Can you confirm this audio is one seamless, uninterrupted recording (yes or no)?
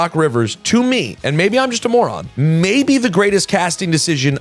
yes